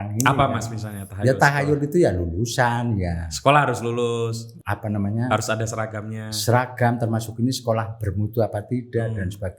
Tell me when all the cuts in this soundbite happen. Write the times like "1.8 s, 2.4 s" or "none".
4.5 s